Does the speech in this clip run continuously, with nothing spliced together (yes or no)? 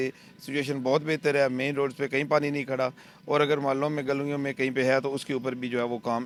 yes